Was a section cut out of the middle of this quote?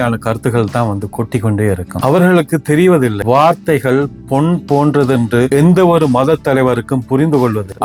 no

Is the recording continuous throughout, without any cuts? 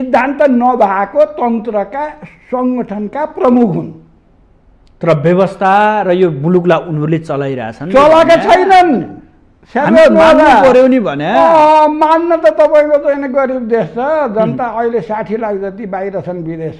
yes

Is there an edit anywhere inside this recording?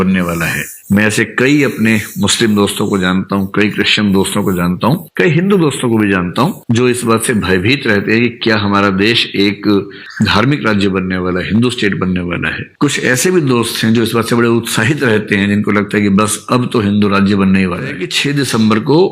yes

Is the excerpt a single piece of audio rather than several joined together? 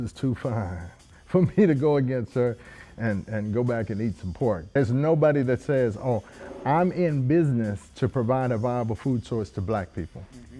no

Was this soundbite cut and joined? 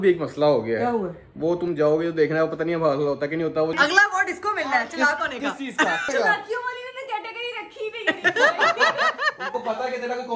yes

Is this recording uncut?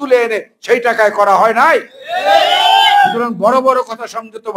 yes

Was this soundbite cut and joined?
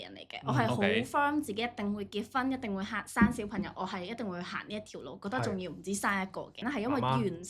yes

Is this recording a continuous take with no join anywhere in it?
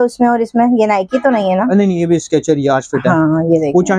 yes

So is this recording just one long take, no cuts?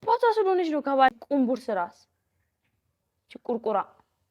no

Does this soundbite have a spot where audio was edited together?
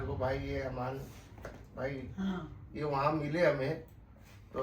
no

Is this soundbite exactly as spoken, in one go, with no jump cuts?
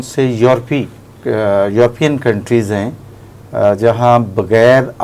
yes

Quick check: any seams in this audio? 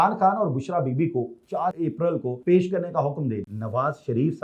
yes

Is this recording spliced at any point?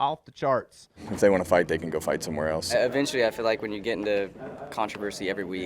yes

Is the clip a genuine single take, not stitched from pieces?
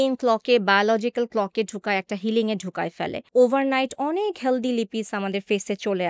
no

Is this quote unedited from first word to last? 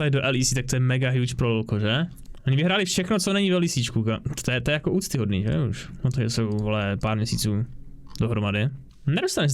no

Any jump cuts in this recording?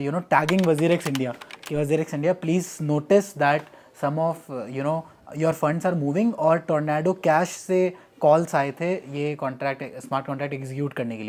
no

